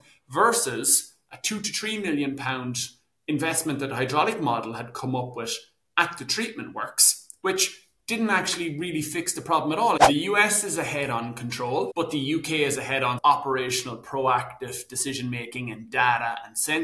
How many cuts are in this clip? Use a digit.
2